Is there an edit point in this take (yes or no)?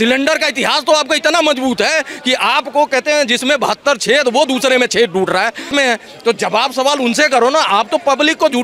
yes